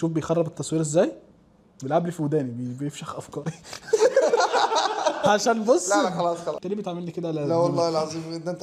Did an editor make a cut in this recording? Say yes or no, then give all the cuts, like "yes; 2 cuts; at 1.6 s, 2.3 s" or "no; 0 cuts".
no; 0 cuts